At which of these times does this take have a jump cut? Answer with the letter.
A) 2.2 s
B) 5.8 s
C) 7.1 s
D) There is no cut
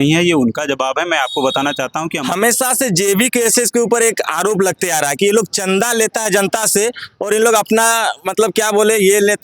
A